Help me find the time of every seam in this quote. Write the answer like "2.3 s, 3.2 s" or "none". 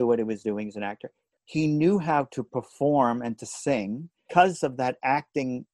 1.1 s